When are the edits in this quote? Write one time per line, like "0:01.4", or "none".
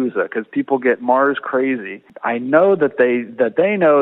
0:02.1